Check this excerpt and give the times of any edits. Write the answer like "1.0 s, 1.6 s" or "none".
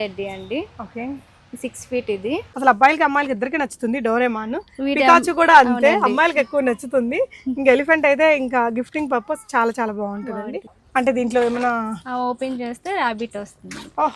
2.5 s, 10.7 s